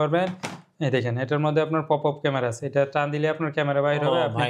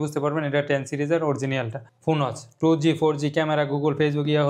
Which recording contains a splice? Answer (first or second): second